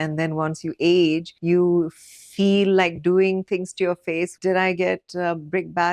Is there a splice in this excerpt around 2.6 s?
no; 2 cuts; at 1.3 s, 4.3 s

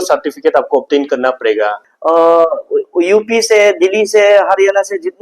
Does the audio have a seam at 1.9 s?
yes; 1 cut; at 1.9 s

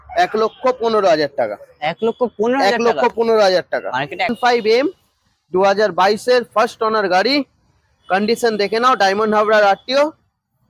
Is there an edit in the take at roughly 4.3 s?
yes; 1 cut; at 4.3 s

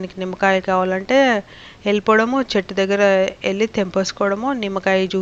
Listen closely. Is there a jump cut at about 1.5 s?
no; 0 cuts

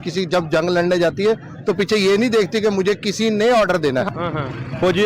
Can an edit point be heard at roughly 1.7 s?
no; 1 cut; at 4.1 s

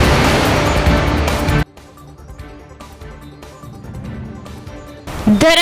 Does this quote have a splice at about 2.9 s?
no; 1 cut; at 1.4 s

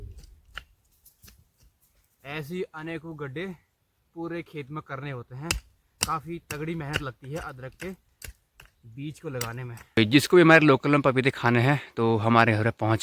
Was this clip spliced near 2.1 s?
yes; 2 cuts; at 2.1 s, 10.0 s

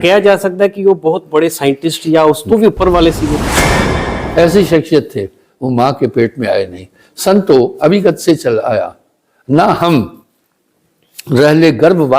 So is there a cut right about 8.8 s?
no; 1 cut; at 3.9 s

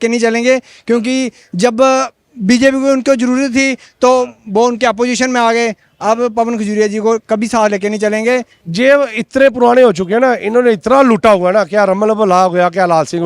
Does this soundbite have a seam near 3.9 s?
no; 1 cut; at 8.6 s

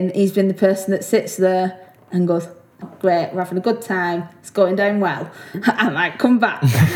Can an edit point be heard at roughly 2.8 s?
yes; 1 cut; at 2.8 s

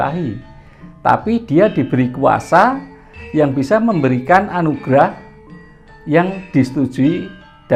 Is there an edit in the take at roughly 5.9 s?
no; 0 cuts

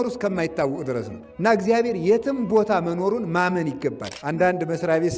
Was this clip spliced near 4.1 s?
yes; 1 cut; at 4.1 s

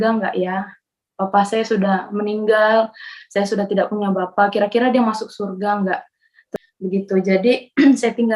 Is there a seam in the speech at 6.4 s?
yes; 1 cut; at 6.4 s

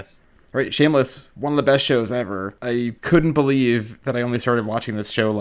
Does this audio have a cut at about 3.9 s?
yes; 3 cuts; at 1.3 s, 2.9 s, 3.9 s

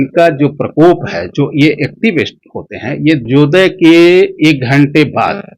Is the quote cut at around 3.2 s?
yes; 1 cut; at 3.2 s

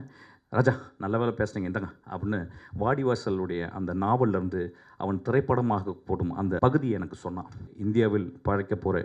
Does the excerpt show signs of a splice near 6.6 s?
yes; 2 cuts; at 6.6 s, 7.7 s

